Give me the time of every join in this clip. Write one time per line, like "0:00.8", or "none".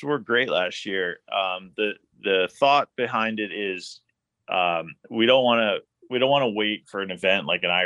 none